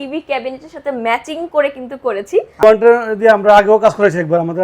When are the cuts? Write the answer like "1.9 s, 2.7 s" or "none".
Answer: 2.6 s